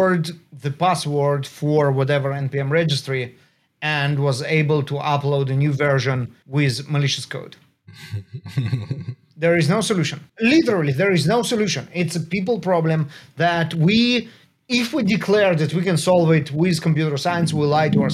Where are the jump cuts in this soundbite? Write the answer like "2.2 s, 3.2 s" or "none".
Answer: 6.4 s, 10.2 s

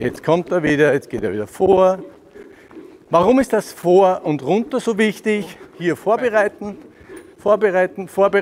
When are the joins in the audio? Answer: 5.7 s

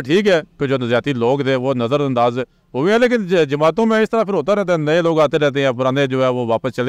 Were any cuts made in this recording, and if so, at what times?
none

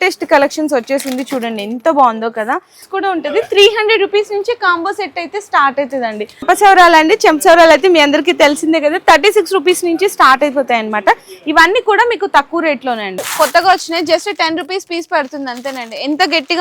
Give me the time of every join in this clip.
2.8 s, 6.4 s, 13.2 s

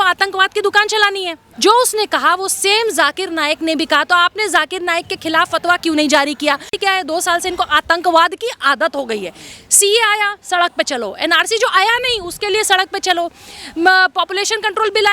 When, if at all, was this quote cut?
1.4 s, 6.7 s

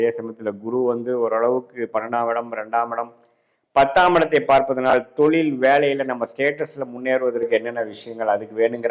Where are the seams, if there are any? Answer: none

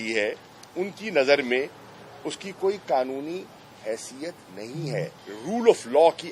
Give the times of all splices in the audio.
5.2 s

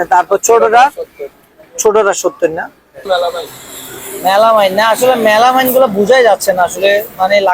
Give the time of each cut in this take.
3.0 s

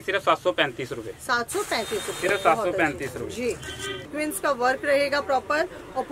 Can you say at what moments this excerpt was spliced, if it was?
4.0 s

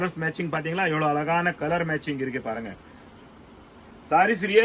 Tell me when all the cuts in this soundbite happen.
none

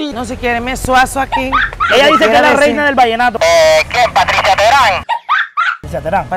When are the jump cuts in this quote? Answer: 1.8 s, 3.4 s

